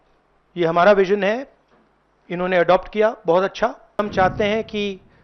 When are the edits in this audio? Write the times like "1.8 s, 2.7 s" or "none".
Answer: 4.0 s

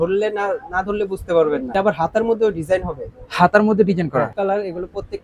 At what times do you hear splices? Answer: 1.7 s, 4.3 s

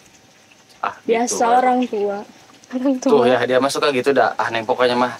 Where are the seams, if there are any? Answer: none

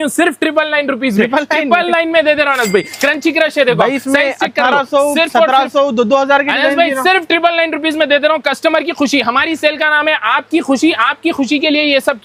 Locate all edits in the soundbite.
none

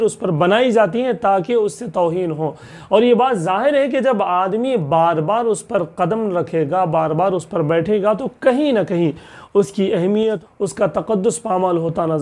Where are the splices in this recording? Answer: 10.4 s

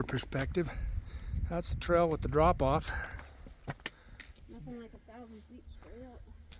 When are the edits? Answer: 3.2 s

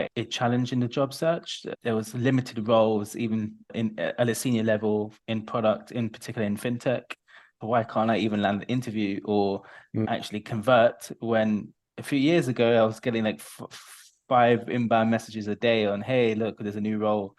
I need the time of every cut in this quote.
7.5 s

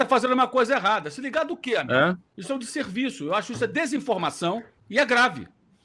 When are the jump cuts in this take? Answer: 2.3 s, 4.8 s

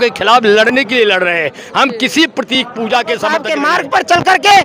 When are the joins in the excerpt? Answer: 3.5 s

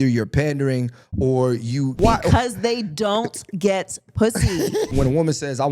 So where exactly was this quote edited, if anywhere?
2.0 s, 4.9 s

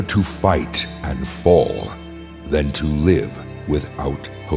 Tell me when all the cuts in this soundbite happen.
none

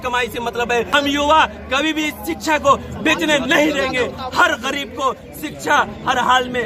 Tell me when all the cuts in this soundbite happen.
0.9 s

